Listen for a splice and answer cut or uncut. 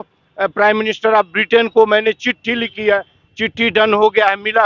uncut